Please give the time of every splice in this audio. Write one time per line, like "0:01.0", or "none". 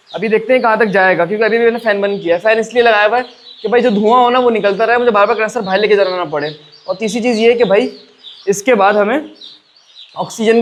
none